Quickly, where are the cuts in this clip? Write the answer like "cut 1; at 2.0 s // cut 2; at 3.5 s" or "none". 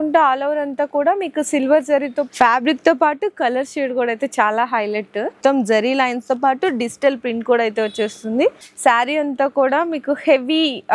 cut 1; at 2.3 s // cut 2; at 5.4 s // cut 3; at 8.7 s